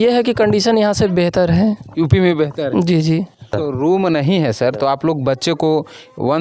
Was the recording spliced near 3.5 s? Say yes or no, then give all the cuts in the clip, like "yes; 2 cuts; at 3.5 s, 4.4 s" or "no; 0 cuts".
yes; 1 cut; at 3.5 s